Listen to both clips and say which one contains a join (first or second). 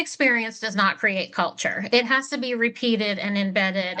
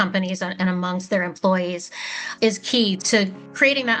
second